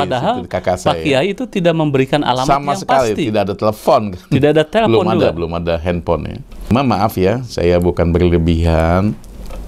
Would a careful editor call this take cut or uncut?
cut